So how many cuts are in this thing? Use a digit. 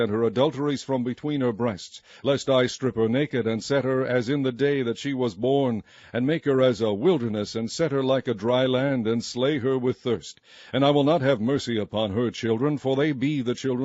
1